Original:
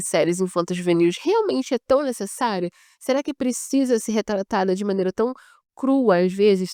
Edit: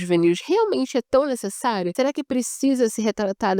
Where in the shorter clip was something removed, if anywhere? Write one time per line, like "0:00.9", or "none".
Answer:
0:01.9

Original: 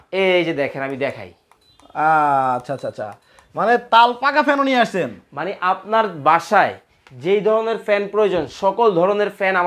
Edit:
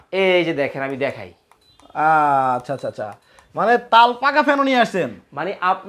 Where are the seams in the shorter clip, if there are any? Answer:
none

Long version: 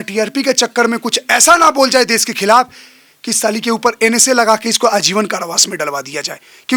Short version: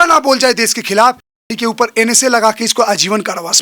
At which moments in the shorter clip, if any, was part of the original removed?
0:01.5

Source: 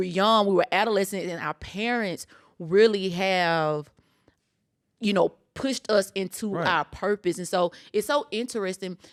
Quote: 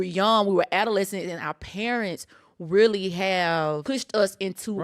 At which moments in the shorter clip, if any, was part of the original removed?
0:03.8

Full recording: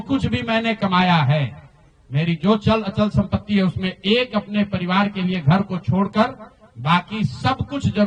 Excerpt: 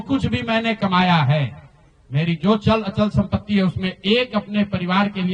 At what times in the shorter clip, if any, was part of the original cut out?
none

